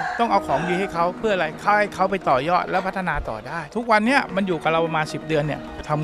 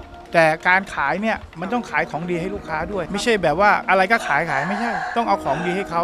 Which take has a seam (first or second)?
first